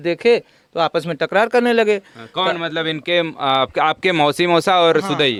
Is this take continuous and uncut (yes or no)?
yes